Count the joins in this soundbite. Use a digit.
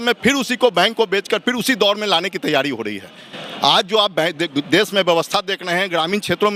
0